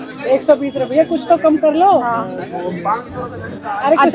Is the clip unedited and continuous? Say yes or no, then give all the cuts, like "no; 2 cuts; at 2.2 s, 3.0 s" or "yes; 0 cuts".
yes; 0 cuts